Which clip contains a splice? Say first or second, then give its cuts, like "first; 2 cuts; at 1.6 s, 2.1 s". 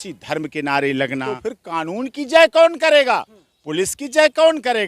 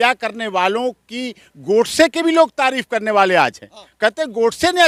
first; 1 cut; at 1.3 s